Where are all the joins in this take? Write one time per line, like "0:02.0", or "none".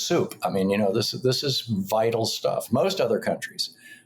0:02.7